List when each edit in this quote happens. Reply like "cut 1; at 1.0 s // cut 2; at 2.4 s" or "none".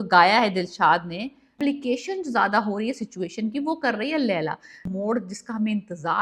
cut 1; at 1.6 s // cut 2; at 4.9 s

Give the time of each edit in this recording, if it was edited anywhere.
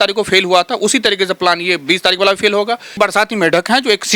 cut 1; at 2.9 s

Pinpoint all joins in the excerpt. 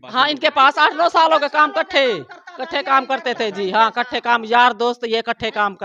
none

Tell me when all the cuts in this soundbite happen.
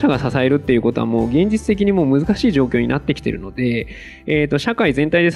none

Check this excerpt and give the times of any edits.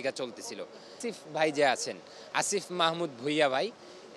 cut 1; at 1.0 s

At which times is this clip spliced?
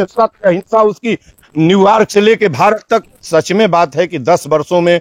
cut 1; at 3.0 s

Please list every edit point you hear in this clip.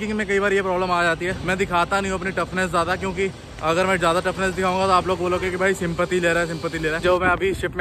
cut 1; at 1.4 s // cut 2; at 7.0 s

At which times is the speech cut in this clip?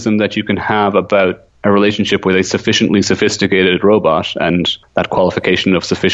cut 1; at 1.5 s // cut 2; at 4.8 s

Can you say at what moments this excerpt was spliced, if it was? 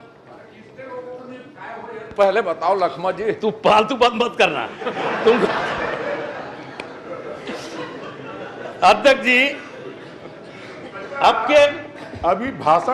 none

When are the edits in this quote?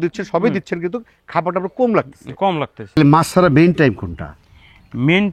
cut 1; at 3.0 s

